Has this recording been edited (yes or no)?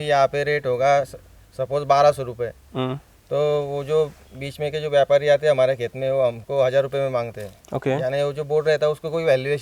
no